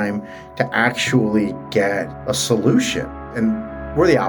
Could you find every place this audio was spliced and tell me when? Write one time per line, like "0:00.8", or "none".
0:02.2
0:03.2